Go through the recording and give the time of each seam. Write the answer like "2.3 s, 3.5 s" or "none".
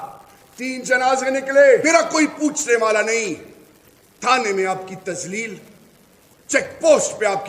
1.8 s